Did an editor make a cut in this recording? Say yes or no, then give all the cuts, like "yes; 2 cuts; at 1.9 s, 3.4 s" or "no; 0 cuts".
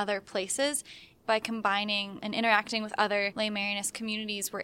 yes; 3 cuts; at 1.1 s, 2.1 s, 3.3 s